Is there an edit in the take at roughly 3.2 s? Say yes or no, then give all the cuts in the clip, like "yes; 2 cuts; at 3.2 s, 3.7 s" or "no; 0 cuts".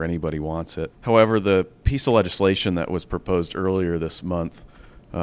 no; 1 cut; at 1.0 s